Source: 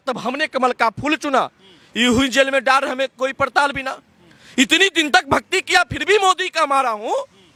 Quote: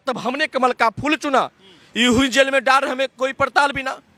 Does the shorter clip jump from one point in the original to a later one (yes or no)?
no